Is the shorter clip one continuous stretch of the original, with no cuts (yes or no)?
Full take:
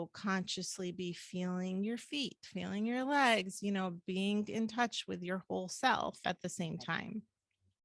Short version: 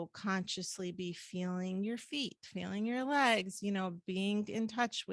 yes